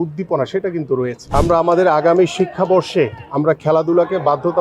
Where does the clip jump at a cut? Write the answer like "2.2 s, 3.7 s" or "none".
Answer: 1.2 s

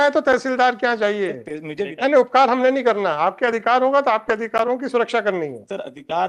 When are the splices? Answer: 1.9 s

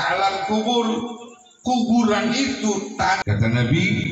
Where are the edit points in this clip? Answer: 3.2 s

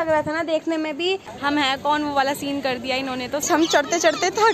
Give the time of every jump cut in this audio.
1.3 s, 3.4 s

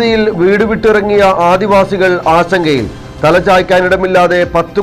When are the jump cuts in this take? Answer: none

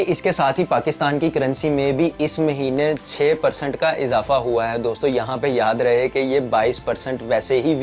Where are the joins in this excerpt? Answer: none

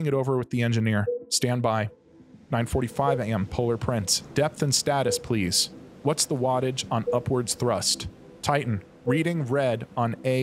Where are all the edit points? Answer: 1.8 s, 8.4 s

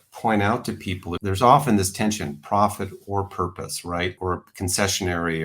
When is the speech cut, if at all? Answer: 1.1 s, 4.2 s

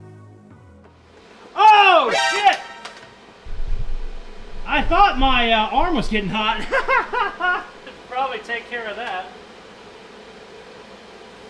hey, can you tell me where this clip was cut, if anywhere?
none

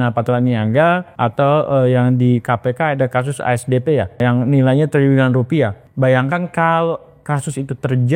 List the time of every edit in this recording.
1.1 s, 4.2 s, 5.8 s

